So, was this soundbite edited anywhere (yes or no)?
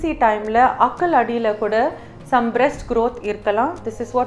no